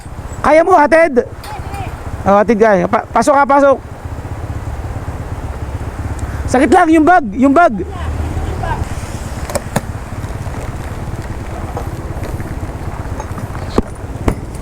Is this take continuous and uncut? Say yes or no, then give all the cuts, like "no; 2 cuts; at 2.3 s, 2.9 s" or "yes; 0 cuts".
no; 1 cut; at 8.8 s